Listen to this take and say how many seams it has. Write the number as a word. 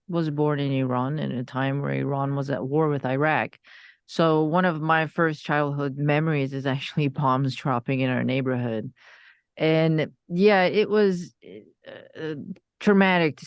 zero